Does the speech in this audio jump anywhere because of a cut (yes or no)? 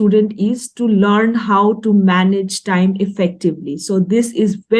no